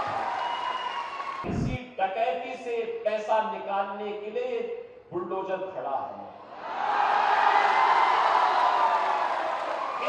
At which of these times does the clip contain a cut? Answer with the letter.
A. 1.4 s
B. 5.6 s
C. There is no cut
A